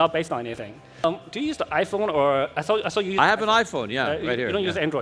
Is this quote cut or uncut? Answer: cut